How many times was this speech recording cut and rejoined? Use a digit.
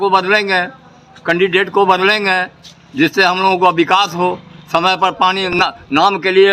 0